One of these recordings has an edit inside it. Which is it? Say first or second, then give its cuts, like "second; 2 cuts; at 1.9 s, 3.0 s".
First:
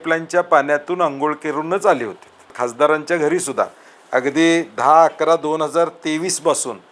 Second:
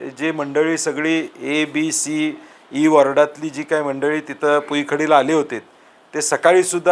first; 1 cut; at 2.5 s